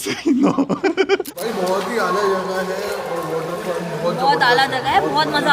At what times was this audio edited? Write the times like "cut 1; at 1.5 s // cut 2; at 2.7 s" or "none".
cut 1; at 1.0 s